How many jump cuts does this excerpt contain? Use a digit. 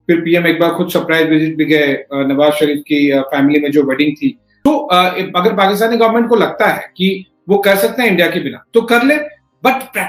1